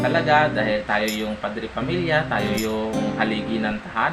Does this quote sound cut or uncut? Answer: uncut